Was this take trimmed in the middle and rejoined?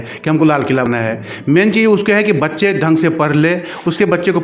no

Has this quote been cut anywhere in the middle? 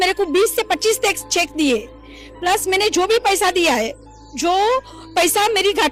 no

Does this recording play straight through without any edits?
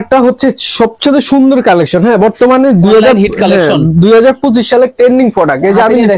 yes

